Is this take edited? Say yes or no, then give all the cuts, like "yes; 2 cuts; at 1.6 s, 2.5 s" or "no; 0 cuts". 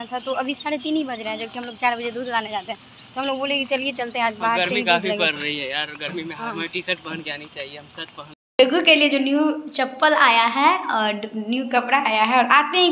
yes; 1 cut; at 8.4 s